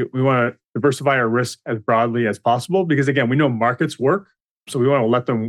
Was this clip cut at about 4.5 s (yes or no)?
no